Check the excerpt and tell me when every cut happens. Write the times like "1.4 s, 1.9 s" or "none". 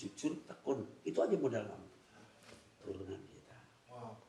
2.8 s